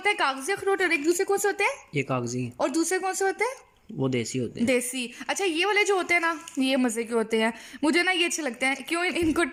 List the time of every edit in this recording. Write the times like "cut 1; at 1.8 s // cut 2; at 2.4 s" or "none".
none